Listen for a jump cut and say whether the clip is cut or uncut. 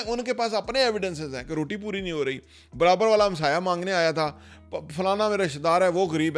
uncut